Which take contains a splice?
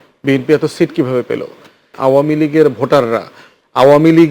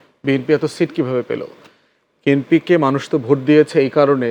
first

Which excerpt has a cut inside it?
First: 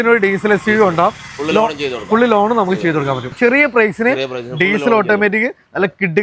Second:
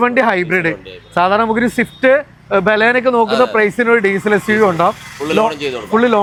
first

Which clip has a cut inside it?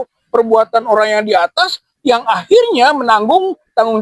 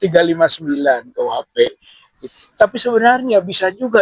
second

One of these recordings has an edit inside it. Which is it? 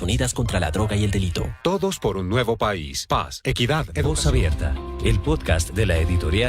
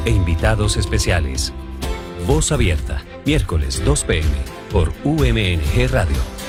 first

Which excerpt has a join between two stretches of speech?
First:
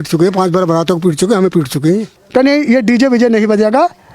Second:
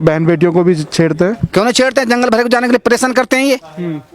first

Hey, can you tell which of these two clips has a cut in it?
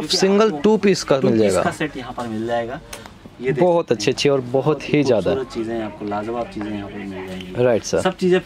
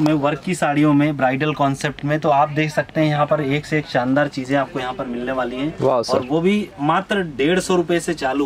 first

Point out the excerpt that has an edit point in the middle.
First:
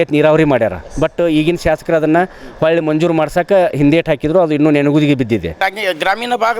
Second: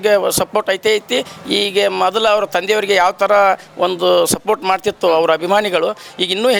first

